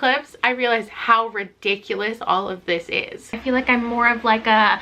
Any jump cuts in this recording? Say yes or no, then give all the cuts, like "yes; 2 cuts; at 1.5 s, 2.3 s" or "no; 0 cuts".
yes; 1 cut; at 3.4 s